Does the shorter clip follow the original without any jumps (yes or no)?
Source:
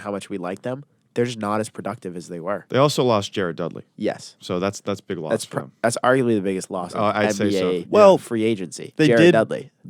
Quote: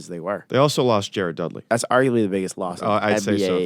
no